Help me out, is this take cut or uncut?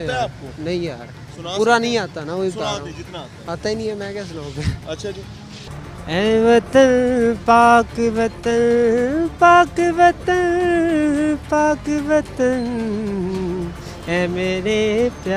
uncut